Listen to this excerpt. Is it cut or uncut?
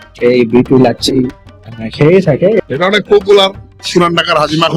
cut